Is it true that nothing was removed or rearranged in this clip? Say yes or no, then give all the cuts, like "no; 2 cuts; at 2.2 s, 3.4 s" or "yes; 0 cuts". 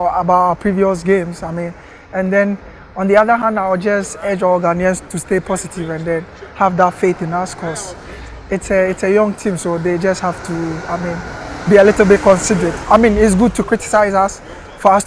yes; 0 cuts